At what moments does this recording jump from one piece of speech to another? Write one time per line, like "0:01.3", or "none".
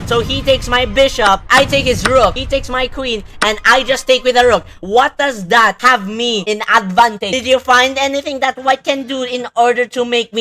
0:01.4
0:07.3